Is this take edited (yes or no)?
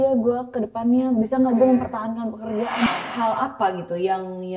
yes